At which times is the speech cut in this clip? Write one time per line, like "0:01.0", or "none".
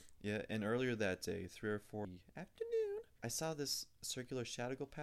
0:02.1
0:03.1